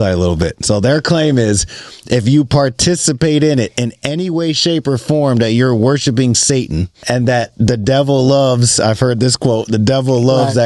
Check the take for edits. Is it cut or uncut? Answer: cut